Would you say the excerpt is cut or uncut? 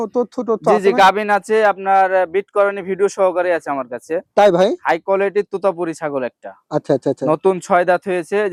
uncut